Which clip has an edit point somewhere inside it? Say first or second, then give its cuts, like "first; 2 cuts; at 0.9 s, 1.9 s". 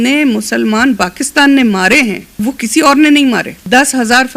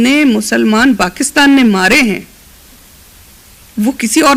first; 2 cuts; at 2.3 s, 3.6 s